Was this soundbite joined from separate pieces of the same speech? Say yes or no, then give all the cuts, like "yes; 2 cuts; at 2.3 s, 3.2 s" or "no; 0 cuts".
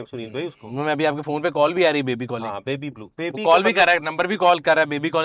no; 0 cuts